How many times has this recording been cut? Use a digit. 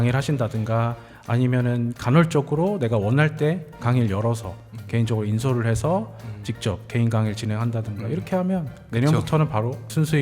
1